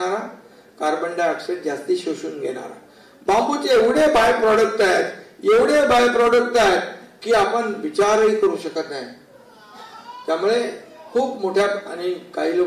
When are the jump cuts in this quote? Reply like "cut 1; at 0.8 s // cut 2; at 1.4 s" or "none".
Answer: none